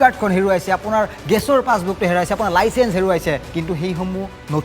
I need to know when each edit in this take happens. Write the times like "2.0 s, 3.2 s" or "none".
3.5 s